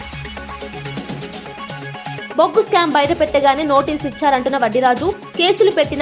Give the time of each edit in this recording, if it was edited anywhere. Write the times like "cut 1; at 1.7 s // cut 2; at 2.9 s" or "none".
cut 1; at 2.2 s